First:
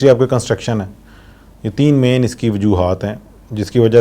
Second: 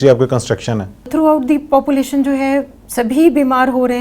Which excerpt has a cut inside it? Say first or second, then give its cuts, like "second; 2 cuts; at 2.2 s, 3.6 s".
second; 1 cut; at 1.1 s